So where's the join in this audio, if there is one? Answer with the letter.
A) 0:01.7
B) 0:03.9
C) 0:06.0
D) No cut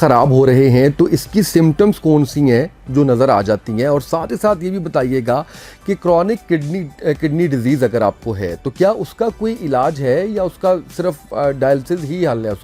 D